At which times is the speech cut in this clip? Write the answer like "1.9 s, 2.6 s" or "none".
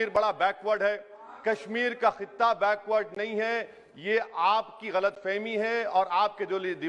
none